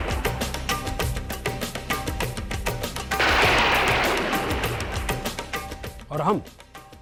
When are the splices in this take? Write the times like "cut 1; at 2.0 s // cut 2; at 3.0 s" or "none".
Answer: none